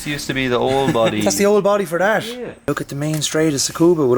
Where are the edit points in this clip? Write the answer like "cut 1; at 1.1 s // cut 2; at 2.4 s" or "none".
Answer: cut 1; at 2.7 s